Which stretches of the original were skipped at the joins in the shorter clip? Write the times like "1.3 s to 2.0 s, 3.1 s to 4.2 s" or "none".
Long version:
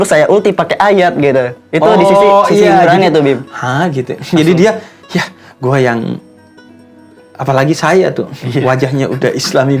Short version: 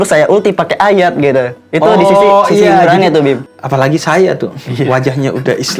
3.5 s to 7.3 s